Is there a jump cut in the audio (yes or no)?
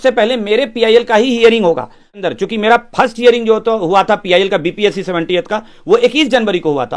yes